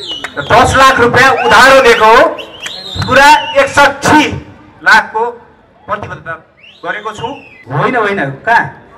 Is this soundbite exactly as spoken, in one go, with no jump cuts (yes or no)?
no